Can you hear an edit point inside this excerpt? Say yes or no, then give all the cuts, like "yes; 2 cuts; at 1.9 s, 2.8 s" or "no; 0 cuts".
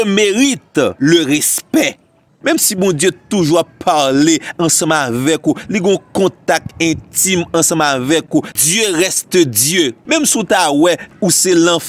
yes; 5 cuts; at 0.9 s, 2.3 s, 8.3 s, 10.0 s, 11.1 s